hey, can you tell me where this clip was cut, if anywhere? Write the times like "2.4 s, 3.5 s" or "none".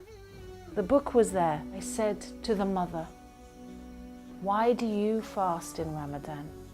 1.8 s

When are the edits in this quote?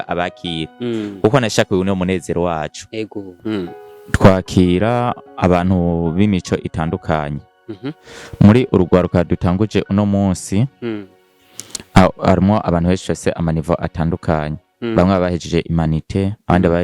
3.3 s

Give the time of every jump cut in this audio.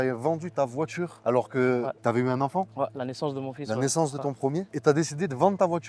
none

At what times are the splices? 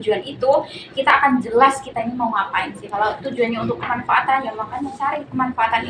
none

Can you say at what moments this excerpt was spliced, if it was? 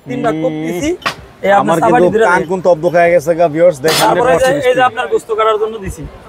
4.0 s

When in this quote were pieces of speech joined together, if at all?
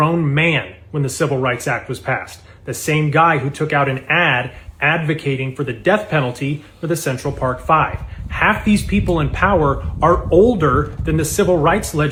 none

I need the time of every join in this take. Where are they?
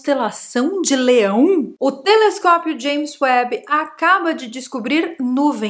1.7 s

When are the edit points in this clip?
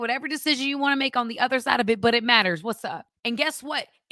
3.1 s

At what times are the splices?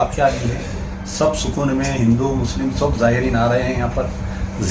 none

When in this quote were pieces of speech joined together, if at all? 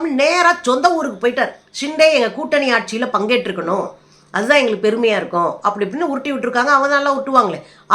1.7 s

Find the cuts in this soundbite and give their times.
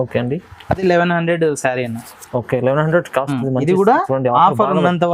none

